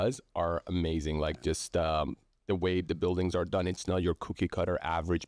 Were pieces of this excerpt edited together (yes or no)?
no